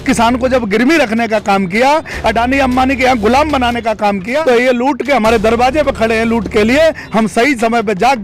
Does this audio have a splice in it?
yes; 1 cut; at 4.4 s

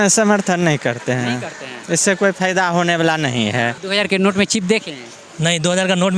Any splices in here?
yes; 1 cut; at 3.8 s

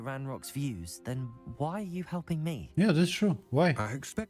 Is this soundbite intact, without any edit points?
yes; 0 cuts

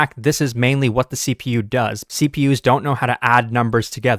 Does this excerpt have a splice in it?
yes; 1 cut; at 2.0 s

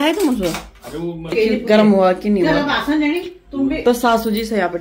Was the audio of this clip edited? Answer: yes; 1 cut; at 1.3 s

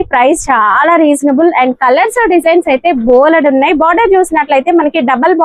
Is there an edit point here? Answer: no; 0 cuts

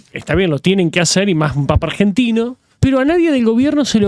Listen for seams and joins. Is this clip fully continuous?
no; 1 cut; at 2.6 s

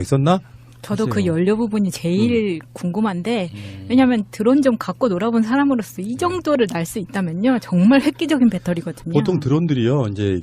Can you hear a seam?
yes; 1 cut; at 4.5 s

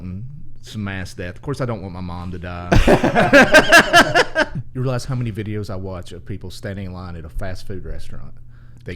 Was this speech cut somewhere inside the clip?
yes; 1 cut; at 4.5 s

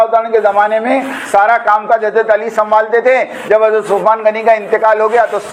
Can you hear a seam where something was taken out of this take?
no; 0 cuts

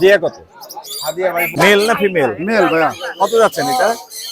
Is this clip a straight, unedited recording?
no; 1 cut; at 1.5 s

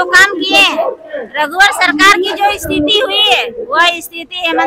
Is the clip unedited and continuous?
yes; 0 cuts

